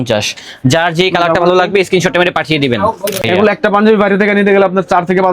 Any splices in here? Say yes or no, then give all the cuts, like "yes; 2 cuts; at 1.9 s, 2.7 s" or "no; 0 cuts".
yes; 1 cut; at 3.2 s